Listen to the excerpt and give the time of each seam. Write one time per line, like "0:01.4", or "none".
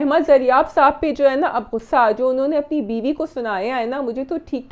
none